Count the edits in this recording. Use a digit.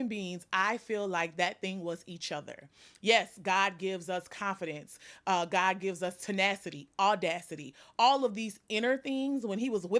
0